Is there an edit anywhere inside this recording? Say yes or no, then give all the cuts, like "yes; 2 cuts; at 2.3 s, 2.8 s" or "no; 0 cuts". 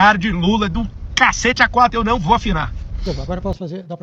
yes; 1 cut; at 3.0 s